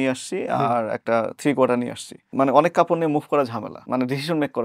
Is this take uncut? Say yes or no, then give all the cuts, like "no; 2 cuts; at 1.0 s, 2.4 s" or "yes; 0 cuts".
no; 2 cuts; at 2.3 s, 3.7 s